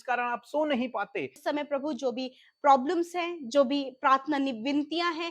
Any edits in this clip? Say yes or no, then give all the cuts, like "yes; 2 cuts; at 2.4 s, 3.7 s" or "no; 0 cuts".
yes; 1 cut; at 1.4 s